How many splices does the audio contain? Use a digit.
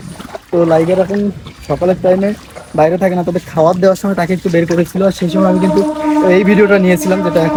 0